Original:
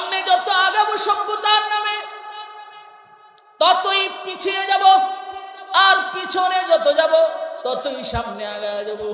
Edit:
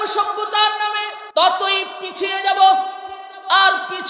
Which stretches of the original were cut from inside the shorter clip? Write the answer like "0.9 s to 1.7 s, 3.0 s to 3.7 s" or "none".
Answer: 2.1 s to 3.4 s